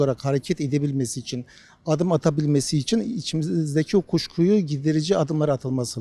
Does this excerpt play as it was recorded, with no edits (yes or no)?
yes